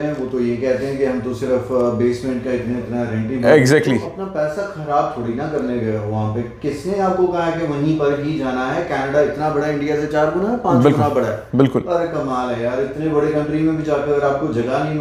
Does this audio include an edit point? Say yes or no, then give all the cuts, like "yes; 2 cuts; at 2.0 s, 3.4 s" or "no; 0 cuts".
no; 0 cuts